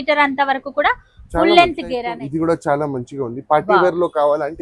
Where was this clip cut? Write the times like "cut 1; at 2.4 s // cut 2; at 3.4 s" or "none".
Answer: cut 1; at 2.1 s